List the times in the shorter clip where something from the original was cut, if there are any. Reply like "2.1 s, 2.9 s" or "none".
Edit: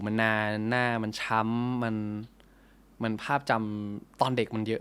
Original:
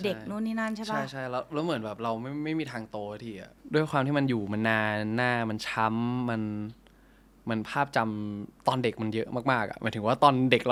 none